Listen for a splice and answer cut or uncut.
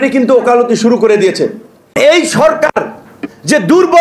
cut